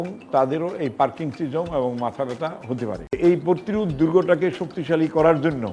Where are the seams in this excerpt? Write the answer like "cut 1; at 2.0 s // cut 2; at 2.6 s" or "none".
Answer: cut 1; at 3.2 s